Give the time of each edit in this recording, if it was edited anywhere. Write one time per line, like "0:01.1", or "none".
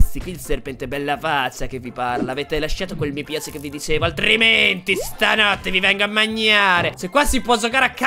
0:06.9